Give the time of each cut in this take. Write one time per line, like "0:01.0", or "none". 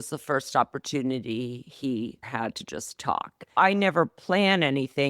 0:02.2
0:03.6